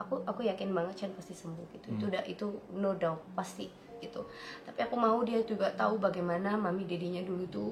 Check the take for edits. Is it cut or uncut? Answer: uncut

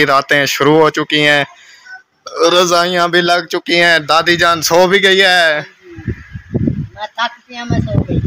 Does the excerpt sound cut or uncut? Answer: uncut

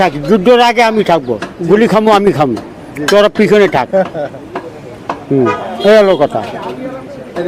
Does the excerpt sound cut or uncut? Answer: uncut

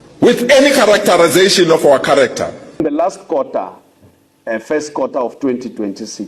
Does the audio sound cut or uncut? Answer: cut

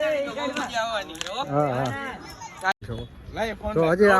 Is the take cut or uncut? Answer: cut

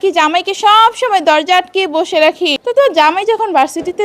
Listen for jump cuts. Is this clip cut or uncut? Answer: cut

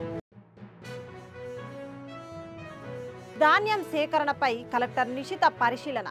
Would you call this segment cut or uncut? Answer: uncut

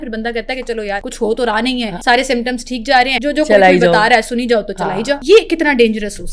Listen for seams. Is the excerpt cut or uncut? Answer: cut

